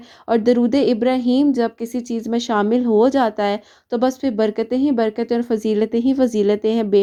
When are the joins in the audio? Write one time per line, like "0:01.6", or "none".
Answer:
none

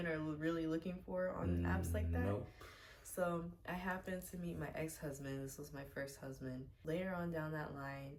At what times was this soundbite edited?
none

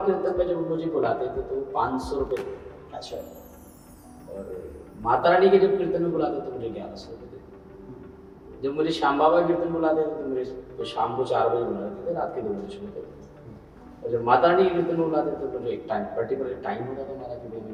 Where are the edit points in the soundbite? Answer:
none

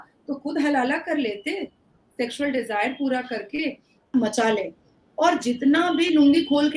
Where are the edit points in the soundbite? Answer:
0:04.1

